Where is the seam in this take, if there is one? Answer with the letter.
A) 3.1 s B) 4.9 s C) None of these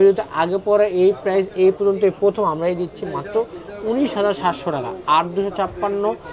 C